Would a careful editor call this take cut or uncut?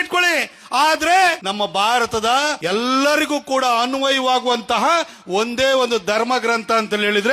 cut